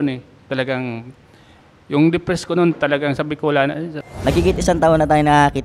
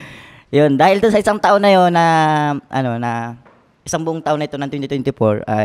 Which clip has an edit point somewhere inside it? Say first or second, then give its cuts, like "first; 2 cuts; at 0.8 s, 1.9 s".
first; 1 cut; at 4.0 s